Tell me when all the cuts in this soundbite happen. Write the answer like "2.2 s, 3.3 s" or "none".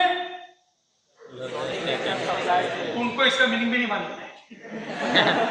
none